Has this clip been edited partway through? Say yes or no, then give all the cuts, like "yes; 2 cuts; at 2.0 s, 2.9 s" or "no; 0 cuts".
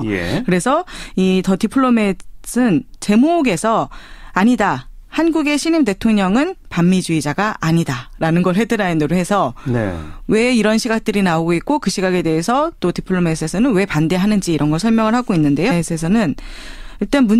no; 0 cuts